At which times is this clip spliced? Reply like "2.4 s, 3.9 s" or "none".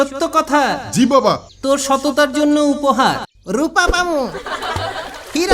1.5 s, 3.3 s